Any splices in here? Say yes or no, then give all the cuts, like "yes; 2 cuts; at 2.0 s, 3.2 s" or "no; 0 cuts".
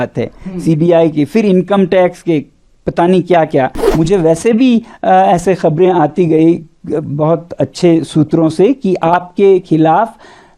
yes; 1 cut; at 3.8 s